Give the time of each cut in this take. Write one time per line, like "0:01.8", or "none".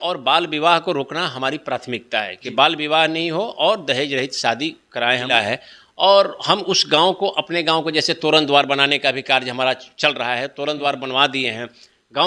0:05.3